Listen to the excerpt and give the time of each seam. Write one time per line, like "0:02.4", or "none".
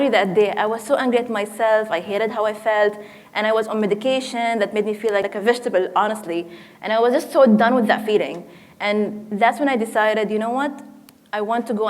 0:05.3